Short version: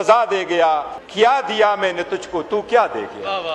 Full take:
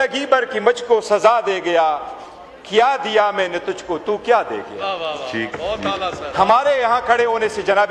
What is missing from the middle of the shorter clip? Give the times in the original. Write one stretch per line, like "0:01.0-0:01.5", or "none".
0:02.1-0:02.5